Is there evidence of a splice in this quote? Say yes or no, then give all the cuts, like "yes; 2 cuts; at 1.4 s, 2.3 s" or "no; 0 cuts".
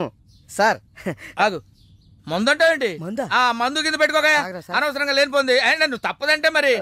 no; 0 cuts